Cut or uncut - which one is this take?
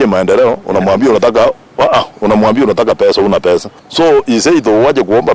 cut